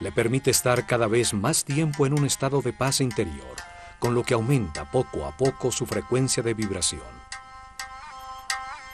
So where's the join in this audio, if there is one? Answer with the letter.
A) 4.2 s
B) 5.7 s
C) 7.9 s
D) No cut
A